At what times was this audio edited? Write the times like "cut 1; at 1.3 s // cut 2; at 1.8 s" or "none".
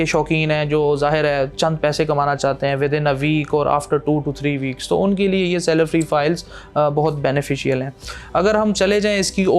none